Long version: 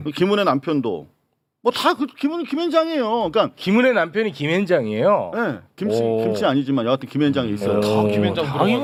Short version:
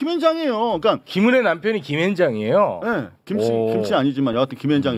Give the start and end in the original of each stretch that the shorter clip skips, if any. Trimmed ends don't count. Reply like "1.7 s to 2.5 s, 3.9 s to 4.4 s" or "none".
none